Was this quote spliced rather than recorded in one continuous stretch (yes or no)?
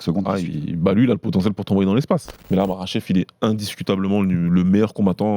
yes